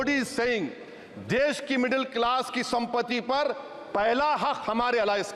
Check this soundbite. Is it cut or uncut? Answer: uncut